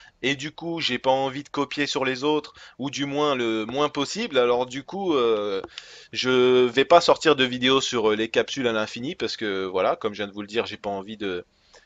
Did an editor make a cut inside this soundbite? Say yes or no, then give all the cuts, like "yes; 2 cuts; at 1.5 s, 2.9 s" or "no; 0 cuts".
no; 0 cuts